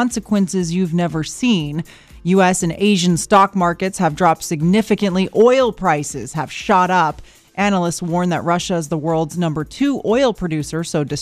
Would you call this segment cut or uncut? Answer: uncut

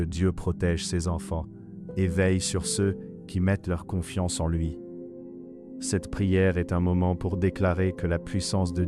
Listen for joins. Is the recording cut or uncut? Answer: uncut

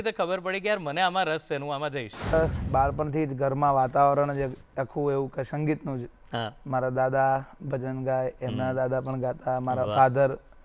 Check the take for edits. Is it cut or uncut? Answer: cut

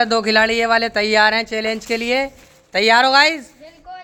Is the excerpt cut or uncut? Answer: uncut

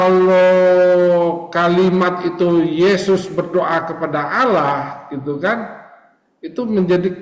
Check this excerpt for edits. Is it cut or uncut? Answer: uncut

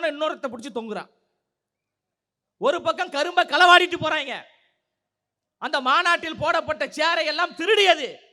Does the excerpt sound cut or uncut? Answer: uncut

